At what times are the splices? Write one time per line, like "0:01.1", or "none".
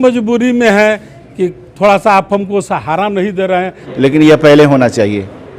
0:03.8